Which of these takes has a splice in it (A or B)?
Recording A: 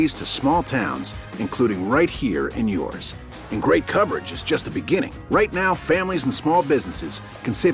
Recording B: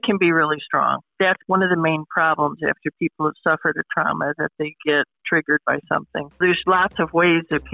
B